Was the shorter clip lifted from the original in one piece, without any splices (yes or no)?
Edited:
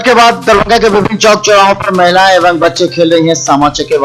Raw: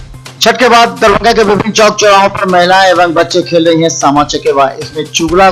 yes